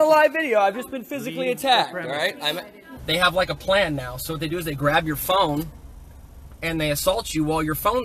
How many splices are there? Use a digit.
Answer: 1